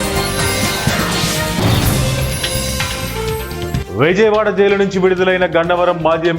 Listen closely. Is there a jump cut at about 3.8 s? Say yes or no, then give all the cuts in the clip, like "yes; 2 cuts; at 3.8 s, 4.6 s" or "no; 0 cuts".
yes; 1 cut; at 3.8 s